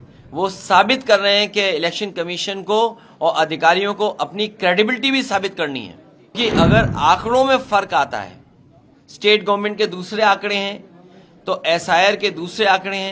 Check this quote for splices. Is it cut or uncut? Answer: cut